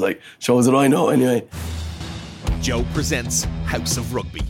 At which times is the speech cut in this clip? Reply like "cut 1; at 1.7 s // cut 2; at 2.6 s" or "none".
cut 1; at 1.5 s